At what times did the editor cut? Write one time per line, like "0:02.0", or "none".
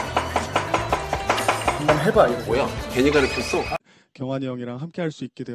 0:03.9